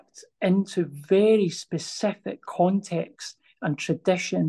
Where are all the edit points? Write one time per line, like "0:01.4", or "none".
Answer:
none